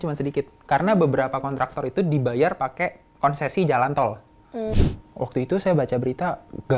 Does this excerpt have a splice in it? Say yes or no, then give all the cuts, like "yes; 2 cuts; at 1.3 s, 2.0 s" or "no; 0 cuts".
yes; 1 cut; at 4.7 s